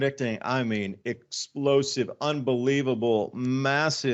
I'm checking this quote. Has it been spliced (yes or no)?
no